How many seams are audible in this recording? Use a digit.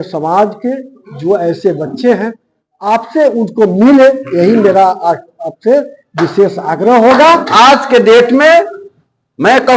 1